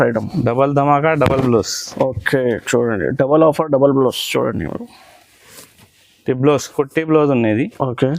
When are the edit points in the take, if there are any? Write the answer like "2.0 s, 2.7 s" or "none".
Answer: none

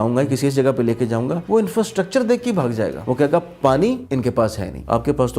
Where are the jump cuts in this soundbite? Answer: 1.4 s, 3.0 s, 4.4 s

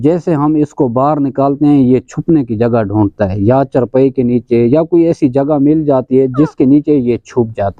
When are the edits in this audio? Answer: none

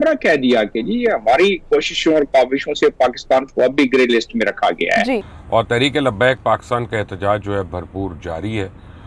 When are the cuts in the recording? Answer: 5.2 s

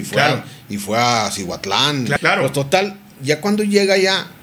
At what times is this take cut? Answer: 2.1 s

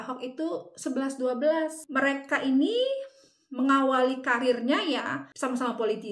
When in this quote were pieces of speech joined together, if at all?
1.8 s, 5.2 s

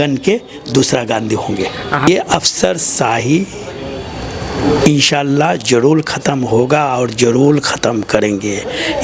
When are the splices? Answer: 2.1 s

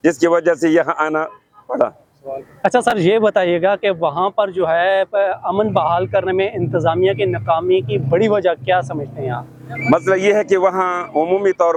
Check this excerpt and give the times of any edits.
none

